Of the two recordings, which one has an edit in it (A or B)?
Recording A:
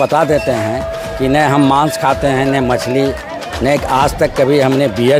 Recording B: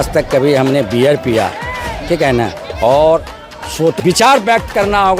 B